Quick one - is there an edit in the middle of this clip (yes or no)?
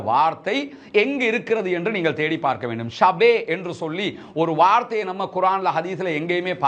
no